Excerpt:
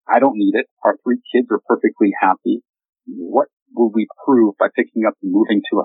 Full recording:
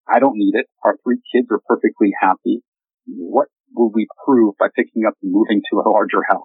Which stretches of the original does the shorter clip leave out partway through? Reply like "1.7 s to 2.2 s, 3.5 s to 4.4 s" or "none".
none